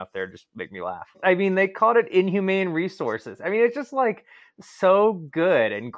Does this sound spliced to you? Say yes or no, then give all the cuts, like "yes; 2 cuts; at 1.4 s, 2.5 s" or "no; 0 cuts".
yes; 1 cut; at 1.2 s